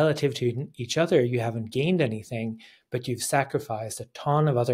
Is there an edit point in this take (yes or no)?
no